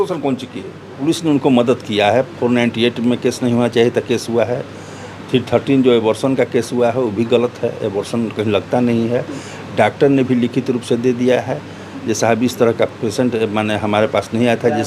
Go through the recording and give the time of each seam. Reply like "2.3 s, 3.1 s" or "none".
0.9 s